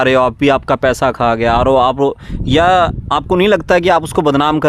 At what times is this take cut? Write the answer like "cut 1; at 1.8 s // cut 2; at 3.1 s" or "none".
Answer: none

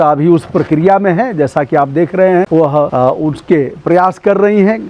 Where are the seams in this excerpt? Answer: cut 1; at 2.7 s

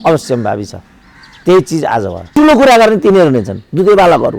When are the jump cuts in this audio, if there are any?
cut 1; at 2.3 s

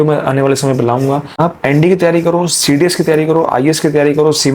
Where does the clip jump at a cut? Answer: cut 1; at 1.3 s

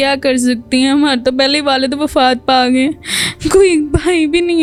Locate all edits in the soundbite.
none

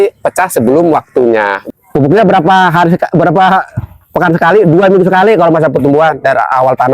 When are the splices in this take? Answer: cut 1; at 1.6 s

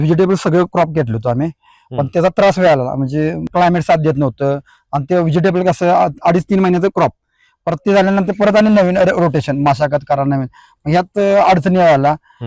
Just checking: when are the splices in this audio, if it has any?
cut 1; at 3.4 s

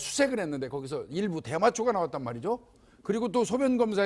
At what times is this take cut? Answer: cut 1; at 1.2 s

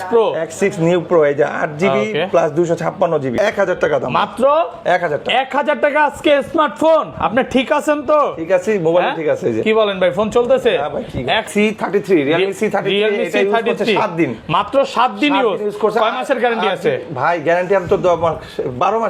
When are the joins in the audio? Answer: cut 1; at 3.3 s // cut 2; at 11.4 s

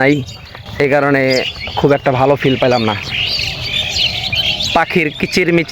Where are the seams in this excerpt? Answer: none

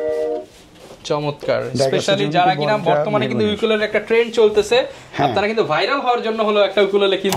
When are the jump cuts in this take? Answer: none

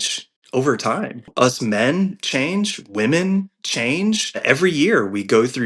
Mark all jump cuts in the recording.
cut 1; at 1.3 s // cut 2; at 4.4 s

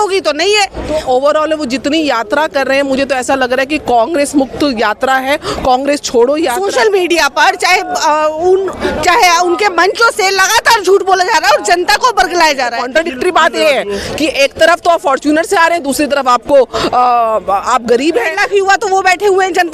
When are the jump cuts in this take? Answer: cut 1; at 0.9 s // cut 2; at 6.6 s // cut 3; at 12.8 s // cut 4; at 18.4 s

